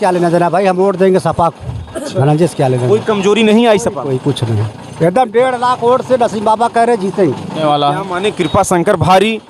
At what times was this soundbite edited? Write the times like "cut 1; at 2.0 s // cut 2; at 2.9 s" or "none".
cut 1; at 7.6 s